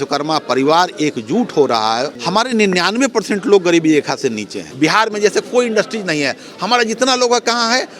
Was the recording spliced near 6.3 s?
no; 2 cuts; at 2.2 s, 4.6 s

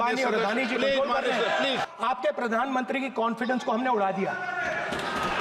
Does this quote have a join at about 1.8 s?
yes; 1 cut; at 1.8 s

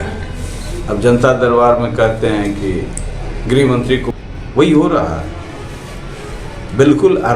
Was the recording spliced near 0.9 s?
no; 1 cut; at 4.1 s

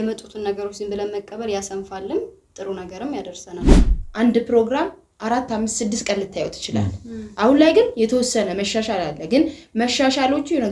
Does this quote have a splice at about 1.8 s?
no; 1 cut; at 3.7 s

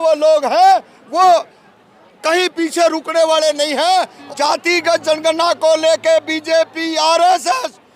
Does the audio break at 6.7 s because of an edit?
no; 1 cut; at 4.2 s

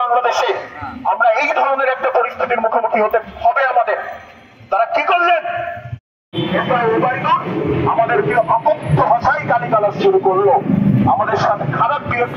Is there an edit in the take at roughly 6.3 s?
yes; 1 cut; at 6.3 s

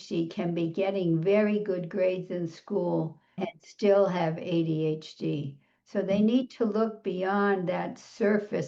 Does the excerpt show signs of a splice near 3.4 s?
yes; 1 cut; at 3.4 s

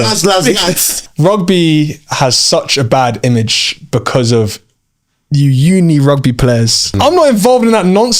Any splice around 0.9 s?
yes; 2 cuts; at 0.9 s, 6.9 s

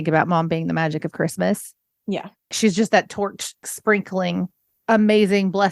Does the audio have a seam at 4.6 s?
yes; 2 cuts; at 3.6 s, 4.6 s

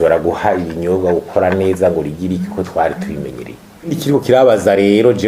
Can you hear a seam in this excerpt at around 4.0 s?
yes; 1 cut; at 4.0 s

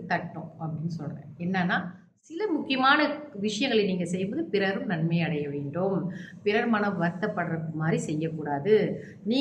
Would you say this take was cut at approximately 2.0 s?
yes; 1 cut; at 2.0 s

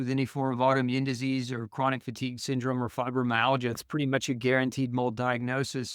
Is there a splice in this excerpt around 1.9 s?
no; 1 cut; at 3.8 s

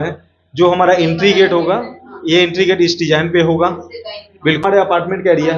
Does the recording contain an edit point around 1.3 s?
no; 1 cut; at 4.6 s

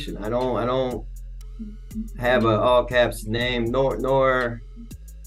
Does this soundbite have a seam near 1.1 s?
no; 0 cuts

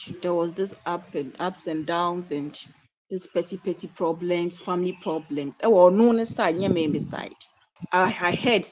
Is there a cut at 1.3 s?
no; 1 cut; at 7.8 s

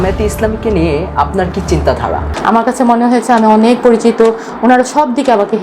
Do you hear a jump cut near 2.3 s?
yes; 1 cut; at 2.3 s

